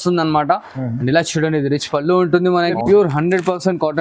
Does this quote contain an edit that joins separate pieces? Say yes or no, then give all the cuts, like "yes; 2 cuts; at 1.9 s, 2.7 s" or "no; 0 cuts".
yes; 1 cut; at 2.8 s